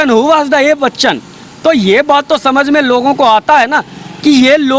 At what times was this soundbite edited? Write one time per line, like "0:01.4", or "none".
none